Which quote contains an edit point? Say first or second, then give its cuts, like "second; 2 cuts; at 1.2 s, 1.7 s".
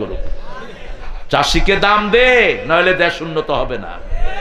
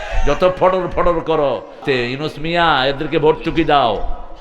second; 1 cut; at 1.8 s